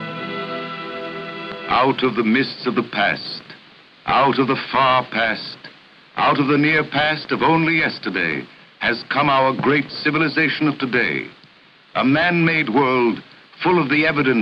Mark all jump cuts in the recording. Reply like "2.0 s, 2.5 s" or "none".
7.8 s